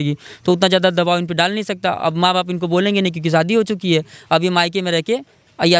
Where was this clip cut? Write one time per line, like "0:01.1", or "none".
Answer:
none